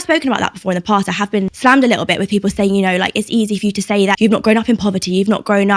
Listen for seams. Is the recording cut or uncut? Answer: cut